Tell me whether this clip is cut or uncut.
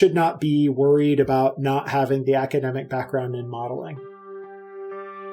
cut